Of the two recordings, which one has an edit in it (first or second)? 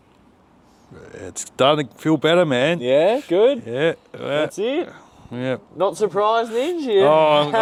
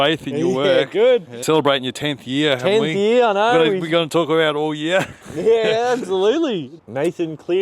second